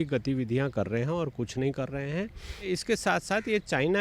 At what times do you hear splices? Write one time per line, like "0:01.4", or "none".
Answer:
0:02.7